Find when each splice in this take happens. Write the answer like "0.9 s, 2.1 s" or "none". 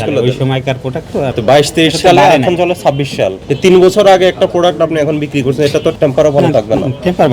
1.4 s, 5.9 s